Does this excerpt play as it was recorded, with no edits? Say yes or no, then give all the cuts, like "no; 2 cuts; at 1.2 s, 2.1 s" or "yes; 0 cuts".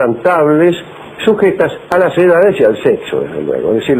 no; 1 cut; at 2.4 s